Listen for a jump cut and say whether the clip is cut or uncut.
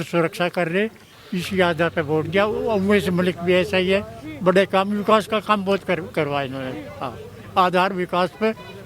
uncut